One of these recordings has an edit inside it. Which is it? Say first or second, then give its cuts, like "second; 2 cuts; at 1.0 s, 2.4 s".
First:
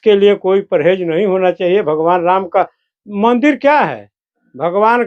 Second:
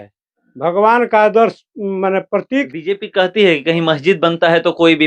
second; 1 cut; at 2.7 s